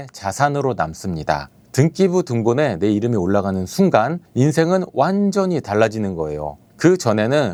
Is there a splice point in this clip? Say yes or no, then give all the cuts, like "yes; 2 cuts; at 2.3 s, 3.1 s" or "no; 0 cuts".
no; 0 cuts